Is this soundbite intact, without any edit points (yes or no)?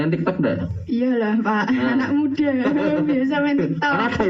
yes